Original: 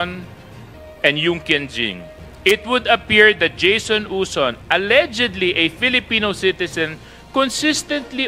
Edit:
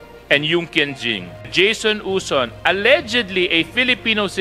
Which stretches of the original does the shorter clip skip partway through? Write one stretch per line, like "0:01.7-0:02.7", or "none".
0:02.2-0:03.5